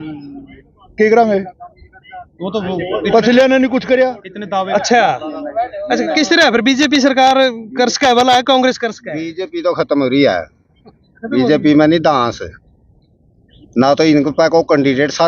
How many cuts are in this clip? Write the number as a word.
one